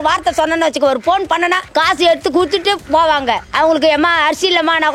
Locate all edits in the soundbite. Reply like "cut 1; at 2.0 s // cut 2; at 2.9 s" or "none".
cut 1; at 1.6 s // cut 2; at 2.8 s // cut 3; at 3.5 s